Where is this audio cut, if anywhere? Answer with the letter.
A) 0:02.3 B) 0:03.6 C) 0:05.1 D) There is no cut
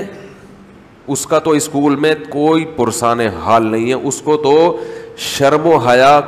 D